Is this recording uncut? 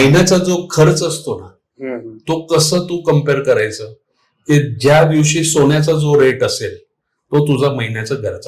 yes; 0 cuts

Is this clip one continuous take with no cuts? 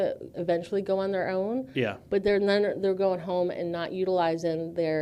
yes; 0 cuts

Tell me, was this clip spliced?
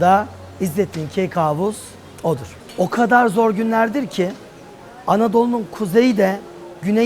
yes; 1 cut; at 2.6 s

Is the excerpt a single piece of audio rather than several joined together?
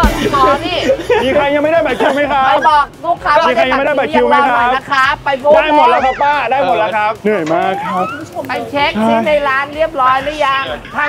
yes; 0 cuts

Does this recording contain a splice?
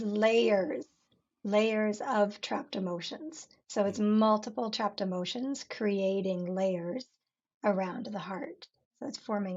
no; 0 cuts

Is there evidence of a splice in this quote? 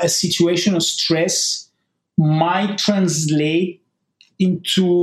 no; 0 cuts

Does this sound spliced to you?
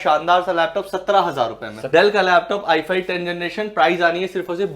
yes; 1 cut; at 1.8 s

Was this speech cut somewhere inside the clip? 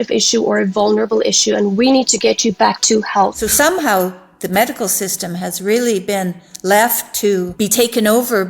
yes; 2 cuts; at 3.4 s, 7.5 s

